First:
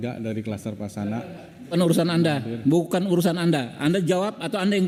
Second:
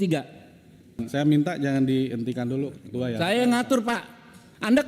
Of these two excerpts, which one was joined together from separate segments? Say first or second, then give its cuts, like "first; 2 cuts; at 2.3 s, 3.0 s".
second; 1 cut; at 1.0 s